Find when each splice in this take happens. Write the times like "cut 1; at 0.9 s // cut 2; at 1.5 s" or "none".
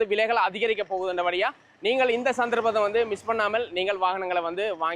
none